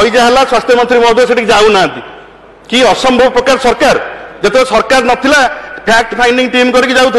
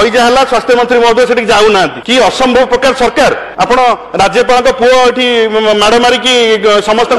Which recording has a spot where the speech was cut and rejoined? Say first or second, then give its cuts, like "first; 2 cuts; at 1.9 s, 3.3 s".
second; 2 cuts; at 2.0 s, 3.5 s